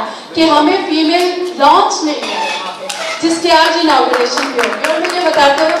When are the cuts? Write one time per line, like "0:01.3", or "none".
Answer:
none